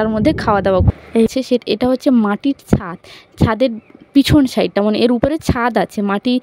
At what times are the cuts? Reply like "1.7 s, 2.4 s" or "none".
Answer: 1.3 s